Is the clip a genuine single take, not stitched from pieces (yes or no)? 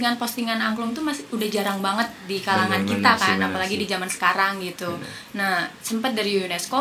yes